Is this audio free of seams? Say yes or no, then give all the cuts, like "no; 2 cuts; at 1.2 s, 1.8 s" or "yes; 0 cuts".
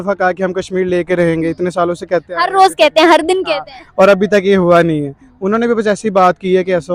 yes; 0 cuts